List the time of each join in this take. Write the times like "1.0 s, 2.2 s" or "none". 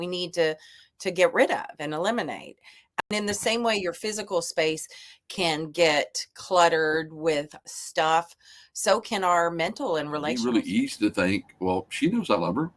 2.8 s, 10.4 s